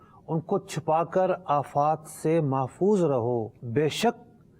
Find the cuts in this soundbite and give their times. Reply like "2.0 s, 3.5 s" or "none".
3.6 s